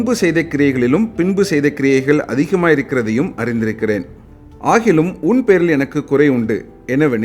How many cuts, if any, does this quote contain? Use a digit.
1